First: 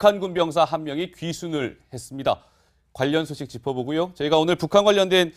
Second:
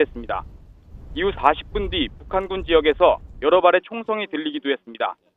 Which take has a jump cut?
second; 1 cut; at 1.9 s

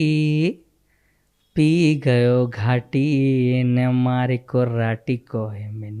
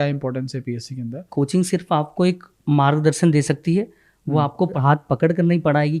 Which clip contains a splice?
second; 2 cuts; at 1.3 s, 4.7 s

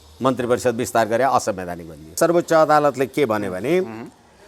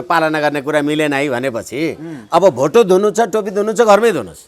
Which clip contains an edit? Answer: first; 1 cut; at 2.1 s

